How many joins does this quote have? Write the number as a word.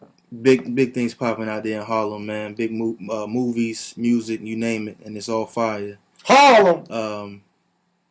one